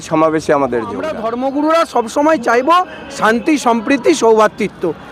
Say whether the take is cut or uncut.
cut